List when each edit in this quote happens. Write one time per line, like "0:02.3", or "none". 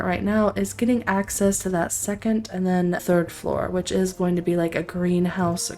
0:03.0